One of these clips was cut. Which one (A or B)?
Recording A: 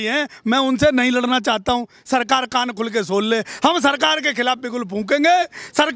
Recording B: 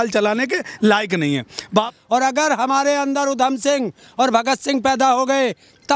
B